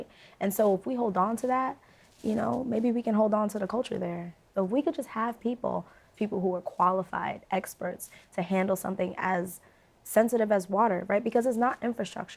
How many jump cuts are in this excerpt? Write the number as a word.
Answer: two